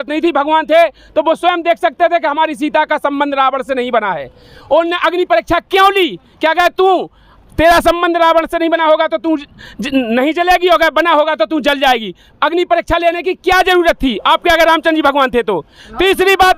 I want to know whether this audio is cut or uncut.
uncut